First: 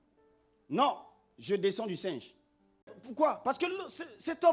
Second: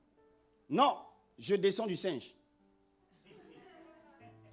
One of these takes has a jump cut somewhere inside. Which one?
first; 1 cut; at 3.0 s

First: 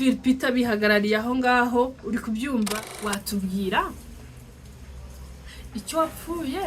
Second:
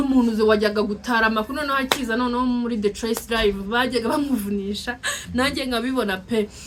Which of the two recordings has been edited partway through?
first; 1 cut; at 2.8 s

